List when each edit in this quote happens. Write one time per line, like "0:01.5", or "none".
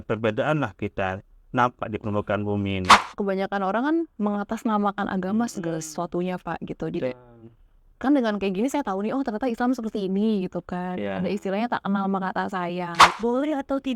0:03.0
0:13.0